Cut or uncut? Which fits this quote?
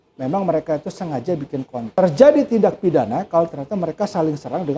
cut